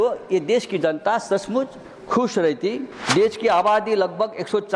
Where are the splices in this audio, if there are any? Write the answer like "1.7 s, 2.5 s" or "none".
3.1 s